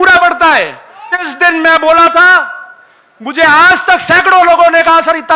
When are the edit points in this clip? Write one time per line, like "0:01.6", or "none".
0:01.3

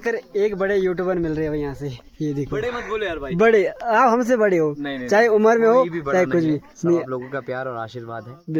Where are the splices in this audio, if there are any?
none

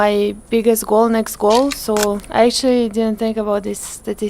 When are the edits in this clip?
0:02.2

